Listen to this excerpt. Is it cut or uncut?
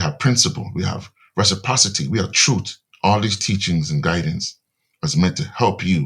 cut